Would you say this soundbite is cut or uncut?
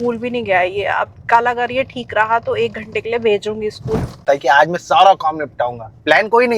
cut